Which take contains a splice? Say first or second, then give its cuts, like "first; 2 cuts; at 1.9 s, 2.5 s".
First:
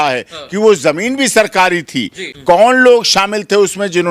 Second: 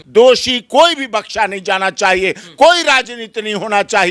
first; 1 cut; at 2.2 s